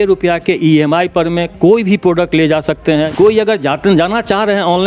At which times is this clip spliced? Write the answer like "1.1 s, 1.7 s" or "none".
3.1 s

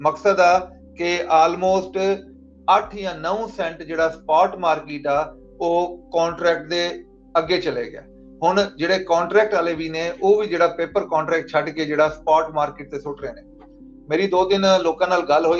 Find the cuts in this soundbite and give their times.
none

